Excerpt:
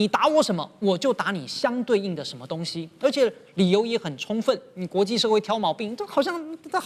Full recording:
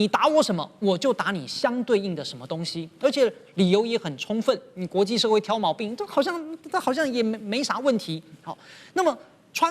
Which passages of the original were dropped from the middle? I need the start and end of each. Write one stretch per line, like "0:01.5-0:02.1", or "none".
none